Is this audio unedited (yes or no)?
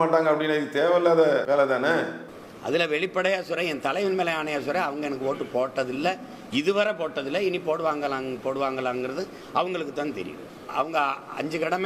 yes